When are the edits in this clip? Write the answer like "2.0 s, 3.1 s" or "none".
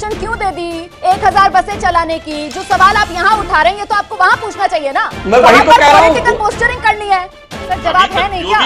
7.4 s

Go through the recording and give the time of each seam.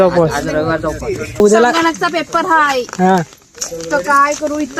1.4 s

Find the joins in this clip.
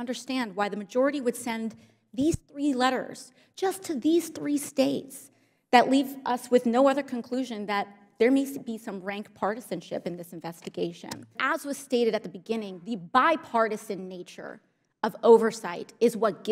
11.3 s

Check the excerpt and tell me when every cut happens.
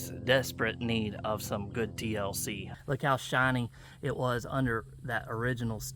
2.7 s

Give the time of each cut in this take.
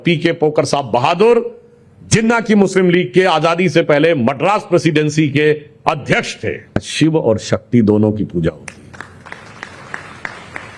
6.9 s

